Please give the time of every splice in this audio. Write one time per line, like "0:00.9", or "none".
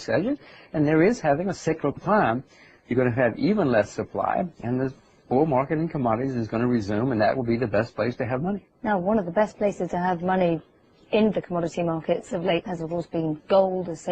none

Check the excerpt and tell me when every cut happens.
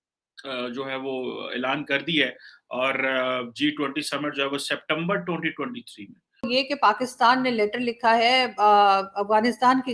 0:06.3

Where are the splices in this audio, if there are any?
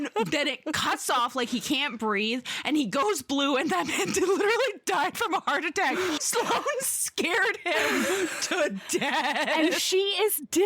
0:06.2

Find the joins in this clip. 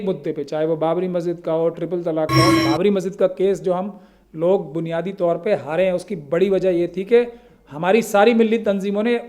0:02.5

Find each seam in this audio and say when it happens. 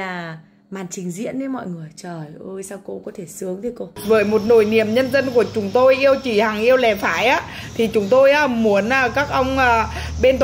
0:04.0

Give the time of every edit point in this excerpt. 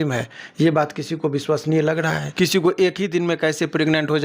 0:02.2

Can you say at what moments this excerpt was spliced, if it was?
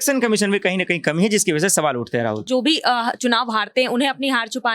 0:02.5

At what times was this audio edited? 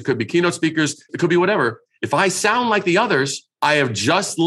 0:01.1
0:03.4

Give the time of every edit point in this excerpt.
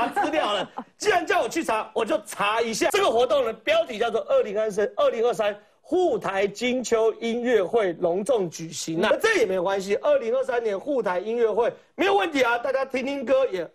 0:02.9
0:09.1

